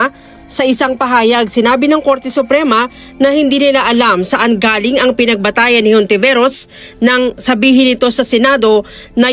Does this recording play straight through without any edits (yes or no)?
no